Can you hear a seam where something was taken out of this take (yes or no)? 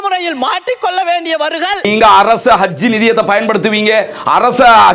yes